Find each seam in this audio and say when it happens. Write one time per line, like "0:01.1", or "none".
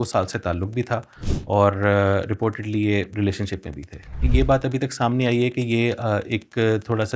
0:04.2

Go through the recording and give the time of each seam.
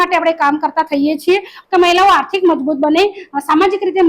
0:01.6

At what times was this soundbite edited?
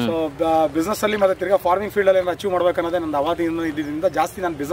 none

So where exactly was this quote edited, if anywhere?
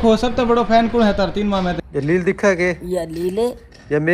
0:01.8

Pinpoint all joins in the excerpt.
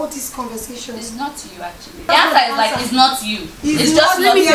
0:02.0

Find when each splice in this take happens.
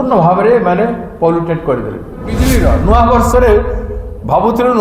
0:02.4

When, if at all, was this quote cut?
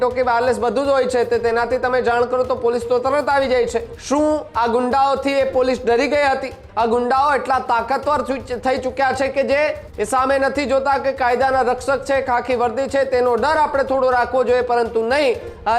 0:03.9
0:06.6
0:09.9

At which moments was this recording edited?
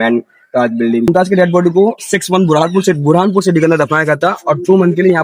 0:01.1

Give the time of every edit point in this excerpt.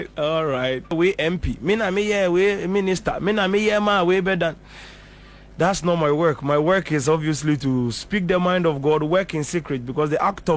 0:00.9

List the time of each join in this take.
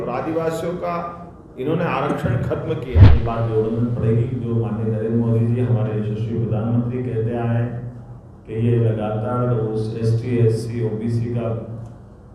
0:03.0

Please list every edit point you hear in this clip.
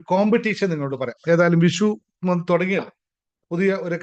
none

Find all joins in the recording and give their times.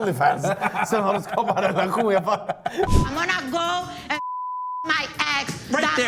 0:02.9

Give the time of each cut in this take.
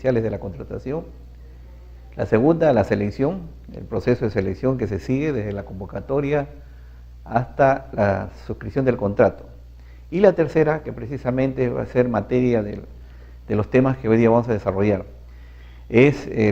0:12.9

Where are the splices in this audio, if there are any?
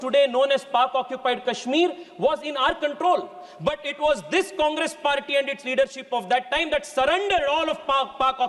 none

